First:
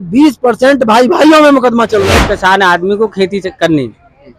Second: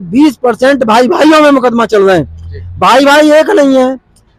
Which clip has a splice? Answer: first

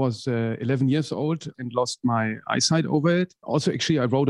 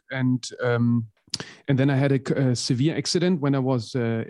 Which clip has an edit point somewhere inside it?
first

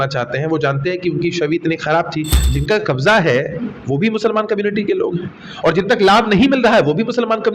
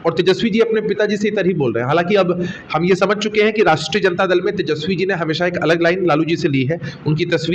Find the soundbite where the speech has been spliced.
first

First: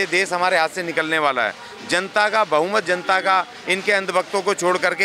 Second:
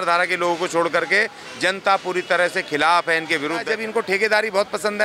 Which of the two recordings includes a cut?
second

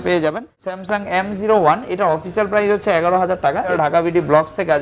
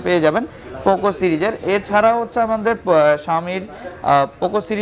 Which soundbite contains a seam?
first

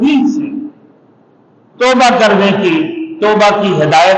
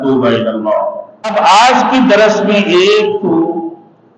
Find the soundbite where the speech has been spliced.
second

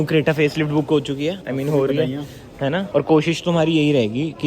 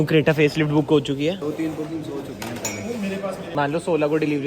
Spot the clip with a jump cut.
second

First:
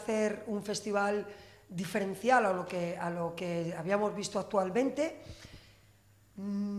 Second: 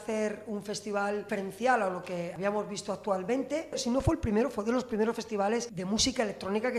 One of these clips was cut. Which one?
second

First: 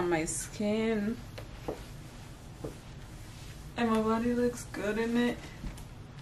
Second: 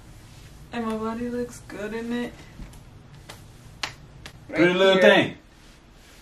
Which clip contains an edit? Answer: second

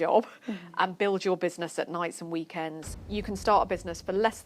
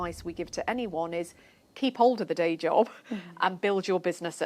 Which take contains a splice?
first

